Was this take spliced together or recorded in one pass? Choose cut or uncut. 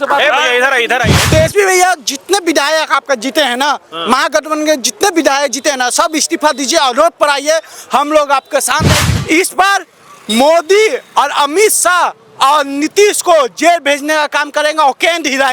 cut